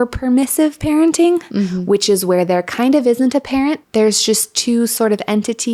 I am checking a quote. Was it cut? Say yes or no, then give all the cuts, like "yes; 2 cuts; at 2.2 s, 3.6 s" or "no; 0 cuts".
no; 0 cuts